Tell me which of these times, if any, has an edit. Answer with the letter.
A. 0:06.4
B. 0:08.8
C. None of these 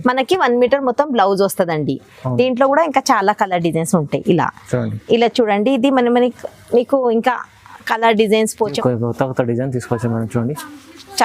B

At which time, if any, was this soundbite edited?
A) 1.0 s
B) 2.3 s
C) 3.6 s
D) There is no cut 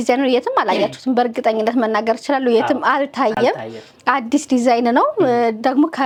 D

